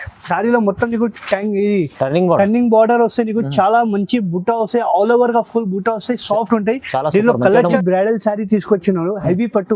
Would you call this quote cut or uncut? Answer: cut